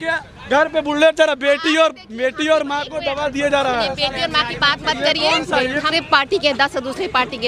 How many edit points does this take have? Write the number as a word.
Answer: one